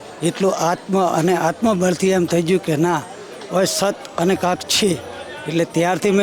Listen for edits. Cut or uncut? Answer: uncut